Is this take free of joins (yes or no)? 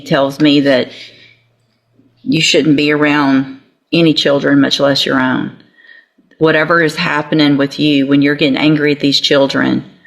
yes